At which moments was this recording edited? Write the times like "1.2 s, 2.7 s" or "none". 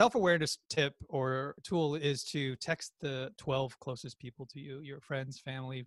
1.1 s, 3.3 s